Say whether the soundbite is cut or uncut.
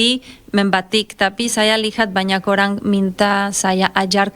uncut